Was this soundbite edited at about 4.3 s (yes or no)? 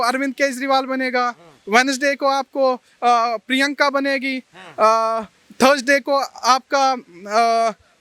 no